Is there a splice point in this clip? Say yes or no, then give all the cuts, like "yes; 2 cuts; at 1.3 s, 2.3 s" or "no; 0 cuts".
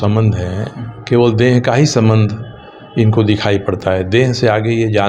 no; 0 cuts